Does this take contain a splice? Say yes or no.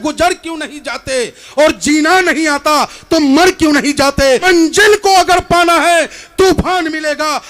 yes